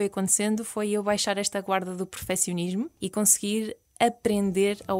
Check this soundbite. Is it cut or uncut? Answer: cut